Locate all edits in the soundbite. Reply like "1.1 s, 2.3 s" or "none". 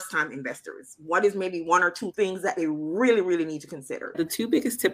2.0 s, 4.1 s